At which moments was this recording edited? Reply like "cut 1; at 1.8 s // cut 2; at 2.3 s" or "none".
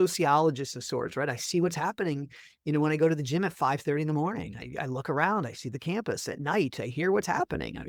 none